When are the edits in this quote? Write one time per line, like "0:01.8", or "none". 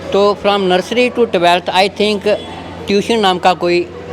none